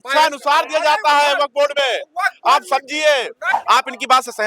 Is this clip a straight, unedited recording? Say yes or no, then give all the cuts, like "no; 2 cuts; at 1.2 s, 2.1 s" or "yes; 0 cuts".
no; 1 cut; at 3.4 s